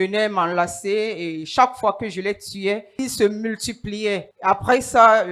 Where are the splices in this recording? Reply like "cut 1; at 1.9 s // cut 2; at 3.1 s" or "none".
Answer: cut 1; at 2.9 s // cut 2; at 4.3 s